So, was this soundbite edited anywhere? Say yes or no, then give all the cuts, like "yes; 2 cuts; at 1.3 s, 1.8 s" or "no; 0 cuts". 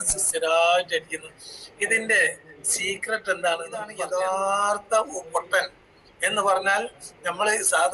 yes; 1 cut; at 3.9 s